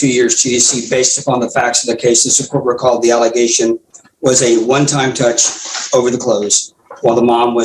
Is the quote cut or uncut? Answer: uncut